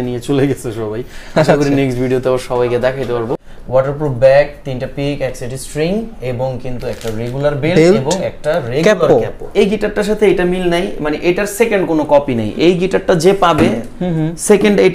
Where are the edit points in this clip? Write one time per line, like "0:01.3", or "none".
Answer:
0:03.4
0:09.4